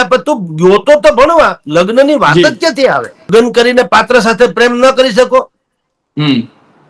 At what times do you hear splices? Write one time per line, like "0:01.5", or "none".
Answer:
0:03.3